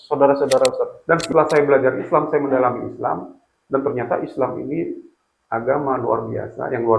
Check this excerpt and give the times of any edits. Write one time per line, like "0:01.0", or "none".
0:01.0